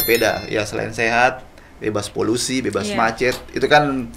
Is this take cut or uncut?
uncut